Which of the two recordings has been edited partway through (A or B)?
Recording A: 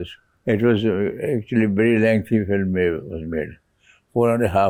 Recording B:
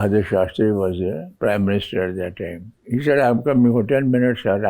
B